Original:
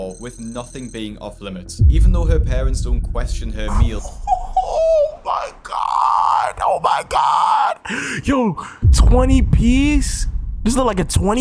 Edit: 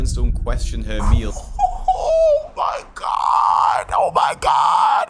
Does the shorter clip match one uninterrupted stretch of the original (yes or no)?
yes